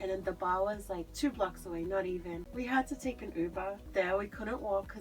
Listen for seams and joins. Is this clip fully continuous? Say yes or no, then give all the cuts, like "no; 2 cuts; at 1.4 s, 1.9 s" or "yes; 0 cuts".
no; 3 cuts; at 1.1 s, 2.4 s, 3.8 s